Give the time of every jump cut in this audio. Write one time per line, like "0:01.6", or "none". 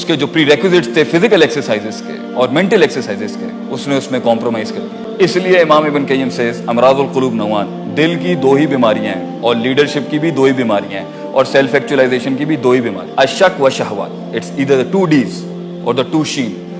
none